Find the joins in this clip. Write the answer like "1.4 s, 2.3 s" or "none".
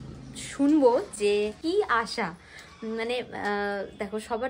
1.6 s